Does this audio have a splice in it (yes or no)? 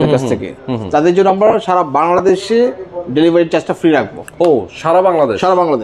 no